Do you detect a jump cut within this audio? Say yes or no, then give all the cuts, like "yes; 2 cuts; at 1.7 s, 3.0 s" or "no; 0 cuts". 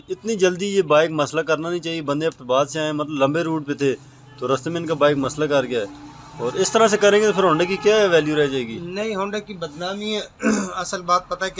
no; 0 cuts